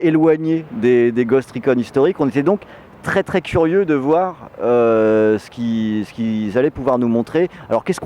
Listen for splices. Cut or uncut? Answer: cut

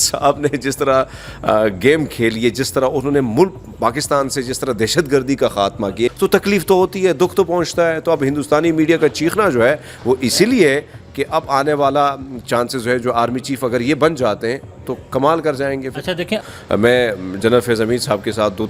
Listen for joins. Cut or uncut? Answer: cut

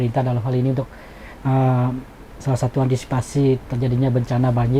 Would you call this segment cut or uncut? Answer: uncut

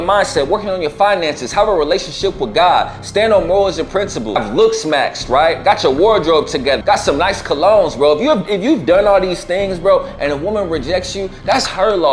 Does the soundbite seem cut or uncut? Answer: cut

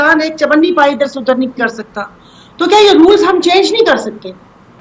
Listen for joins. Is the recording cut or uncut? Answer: uncut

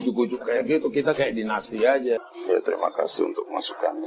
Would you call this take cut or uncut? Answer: cut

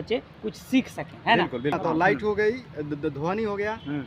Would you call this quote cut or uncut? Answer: cut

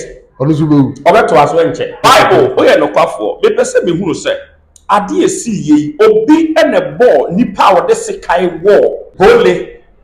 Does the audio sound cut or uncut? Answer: cut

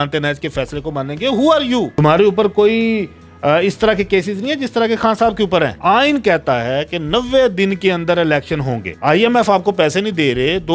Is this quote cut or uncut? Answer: cut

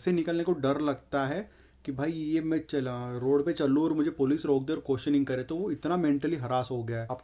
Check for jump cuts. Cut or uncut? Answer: uncut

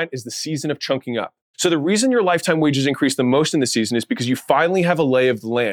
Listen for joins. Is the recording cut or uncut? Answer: cut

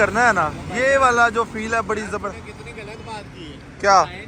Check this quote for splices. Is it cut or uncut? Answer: uncut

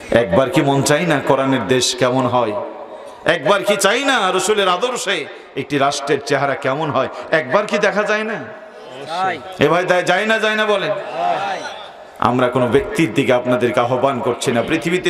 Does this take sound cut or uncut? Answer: uncut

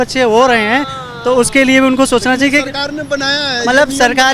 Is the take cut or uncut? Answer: uncut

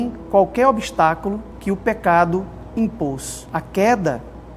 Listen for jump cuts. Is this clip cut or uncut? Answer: cut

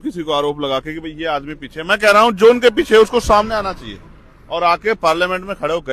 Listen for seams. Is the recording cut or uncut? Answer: uncut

